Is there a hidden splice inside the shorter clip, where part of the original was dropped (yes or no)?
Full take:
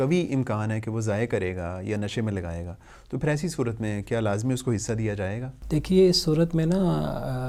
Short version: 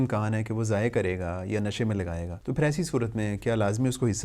yes